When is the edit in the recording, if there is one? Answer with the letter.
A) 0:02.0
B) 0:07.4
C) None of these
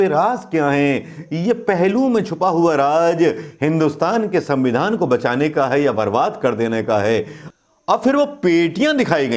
B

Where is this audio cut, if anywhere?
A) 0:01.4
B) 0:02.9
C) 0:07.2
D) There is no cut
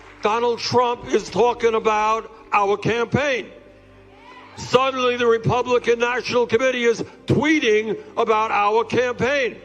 A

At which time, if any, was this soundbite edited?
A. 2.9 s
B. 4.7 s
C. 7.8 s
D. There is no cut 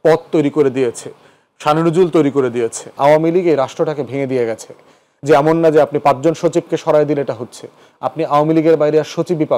A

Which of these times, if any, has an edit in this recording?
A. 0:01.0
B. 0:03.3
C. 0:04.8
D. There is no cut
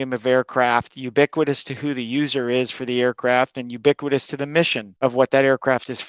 C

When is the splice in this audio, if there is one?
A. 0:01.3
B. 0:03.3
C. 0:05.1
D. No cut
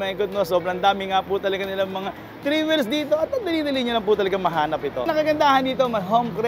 C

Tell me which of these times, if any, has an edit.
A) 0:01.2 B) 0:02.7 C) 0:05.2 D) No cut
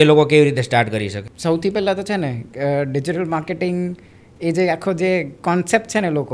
A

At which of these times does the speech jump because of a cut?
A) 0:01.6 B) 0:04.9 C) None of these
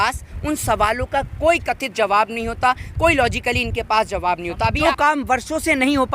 B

